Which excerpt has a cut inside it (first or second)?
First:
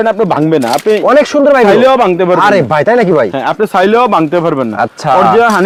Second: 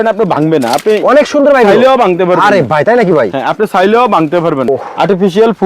second